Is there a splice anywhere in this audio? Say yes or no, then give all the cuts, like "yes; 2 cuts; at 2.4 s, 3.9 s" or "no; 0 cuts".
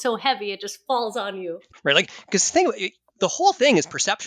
yes; 1 cut; at 1.7 s